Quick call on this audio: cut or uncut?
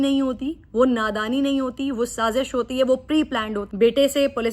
cut